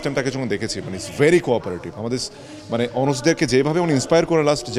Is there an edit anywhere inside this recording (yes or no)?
no